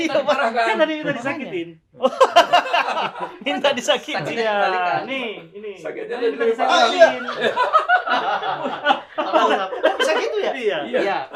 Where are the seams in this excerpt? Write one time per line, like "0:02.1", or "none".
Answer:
none